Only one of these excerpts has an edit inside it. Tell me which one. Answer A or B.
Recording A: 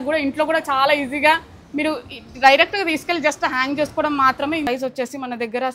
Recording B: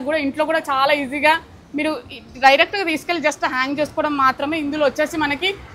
A